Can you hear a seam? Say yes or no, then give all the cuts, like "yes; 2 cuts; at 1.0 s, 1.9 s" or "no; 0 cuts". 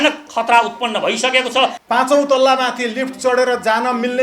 yes; 1 cut; at 1.8 s